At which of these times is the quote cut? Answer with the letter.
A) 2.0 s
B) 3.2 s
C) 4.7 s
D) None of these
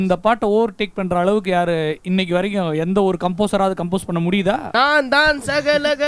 C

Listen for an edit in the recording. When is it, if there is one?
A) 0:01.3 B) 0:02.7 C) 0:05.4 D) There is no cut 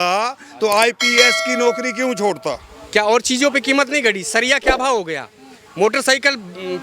B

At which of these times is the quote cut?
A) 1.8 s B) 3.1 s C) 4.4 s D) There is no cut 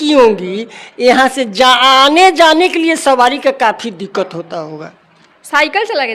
D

